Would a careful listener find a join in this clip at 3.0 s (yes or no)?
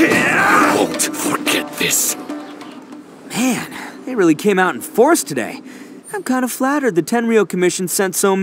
yes